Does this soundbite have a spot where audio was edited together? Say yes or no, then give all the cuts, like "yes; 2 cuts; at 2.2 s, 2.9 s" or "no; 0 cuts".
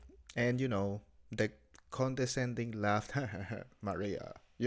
no; 0 cuts